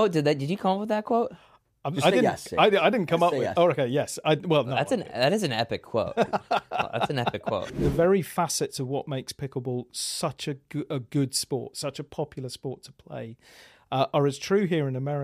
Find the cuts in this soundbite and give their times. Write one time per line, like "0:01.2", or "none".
0:07.7